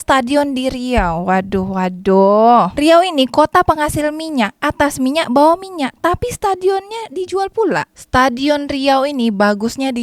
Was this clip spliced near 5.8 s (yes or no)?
no